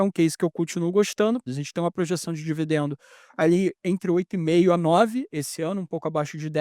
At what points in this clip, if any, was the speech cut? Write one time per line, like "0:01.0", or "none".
0:01.5